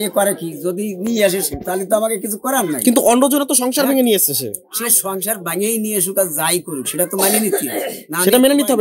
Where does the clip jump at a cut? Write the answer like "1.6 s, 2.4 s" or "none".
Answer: none